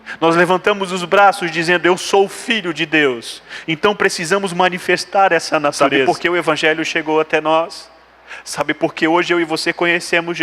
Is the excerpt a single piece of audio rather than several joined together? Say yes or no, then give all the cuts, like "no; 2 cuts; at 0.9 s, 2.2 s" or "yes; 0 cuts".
no; 1 cut; at 5.9 s